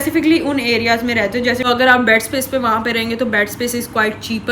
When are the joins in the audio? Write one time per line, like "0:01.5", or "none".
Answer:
0:01.6